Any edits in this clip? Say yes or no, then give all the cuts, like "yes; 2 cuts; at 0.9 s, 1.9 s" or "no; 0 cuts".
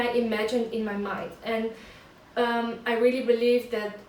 no; 0 cuts